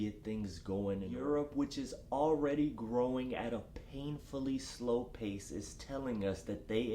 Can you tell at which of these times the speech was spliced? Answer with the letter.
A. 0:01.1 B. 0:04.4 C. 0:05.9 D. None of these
A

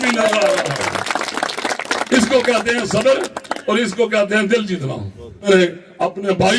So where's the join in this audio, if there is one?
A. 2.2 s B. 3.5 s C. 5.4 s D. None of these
C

